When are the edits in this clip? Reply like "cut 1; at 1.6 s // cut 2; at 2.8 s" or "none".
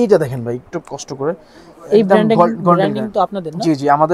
none